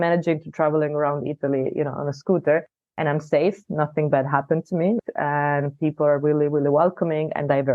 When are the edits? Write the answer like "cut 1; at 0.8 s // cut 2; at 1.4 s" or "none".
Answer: cut 1; at 5.0 s